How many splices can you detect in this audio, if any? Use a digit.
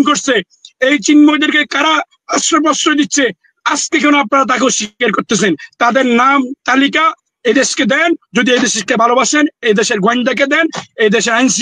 0